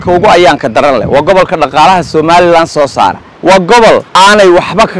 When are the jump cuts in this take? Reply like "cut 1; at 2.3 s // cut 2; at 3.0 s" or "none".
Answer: cut 1; at 3.3 s // cut 2; at 4.1 s